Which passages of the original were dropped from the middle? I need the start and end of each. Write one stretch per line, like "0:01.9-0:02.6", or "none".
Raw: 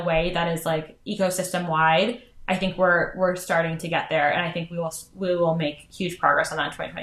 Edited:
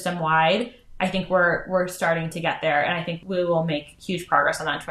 0:04.6-0:05.1